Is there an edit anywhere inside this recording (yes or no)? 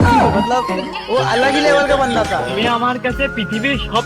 yes